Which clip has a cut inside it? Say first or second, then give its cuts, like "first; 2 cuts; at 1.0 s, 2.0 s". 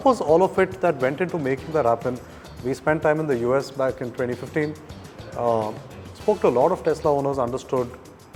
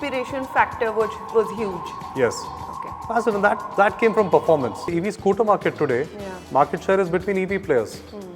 second; 1 cut; at 4.9 s